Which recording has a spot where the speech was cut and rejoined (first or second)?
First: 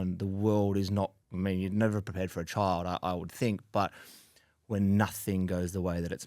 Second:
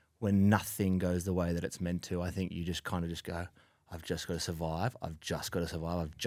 first